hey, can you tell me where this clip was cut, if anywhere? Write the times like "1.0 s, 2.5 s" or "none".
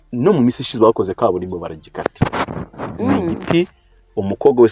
none

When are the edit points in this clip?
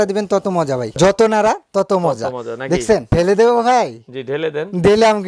0.9 s, 3.1 s

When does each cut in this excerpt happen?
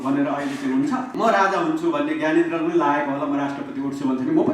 1.1 s

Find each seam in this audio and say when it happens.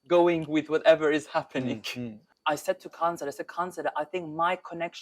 2.2 s

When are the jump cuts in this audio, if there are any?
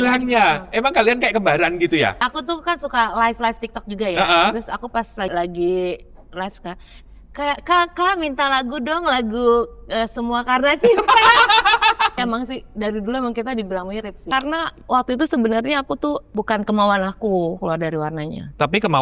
2.3 s, 5.3 s, 12.2 s, 14.2 s, 16.2 s

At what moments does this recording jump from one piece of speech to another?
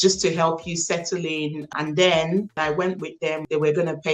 1.7 s, 3.0 s

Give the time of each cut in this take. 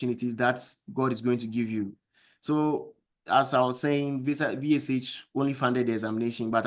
none

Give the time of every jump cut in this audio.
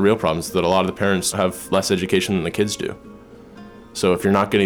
1.3 s

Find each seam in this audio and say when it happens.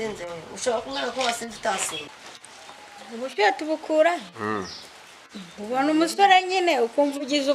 2.1 s

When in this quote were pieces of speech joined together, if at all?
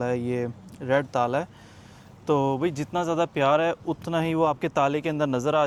none

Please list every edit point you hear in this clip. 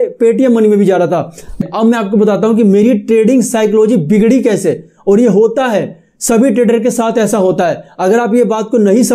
1.6 s

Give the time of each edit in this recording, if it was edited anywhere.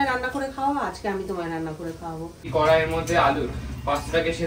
2.5 s

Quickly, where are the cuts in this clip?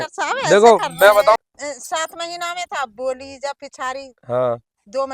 1.4 s

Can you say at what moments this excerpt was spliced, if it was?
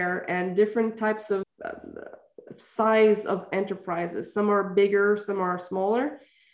none

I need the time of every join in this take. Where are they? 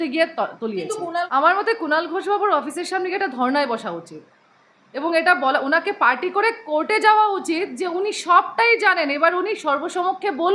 1.3 s

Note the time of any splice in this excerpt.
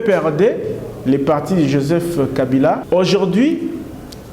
2.8 s

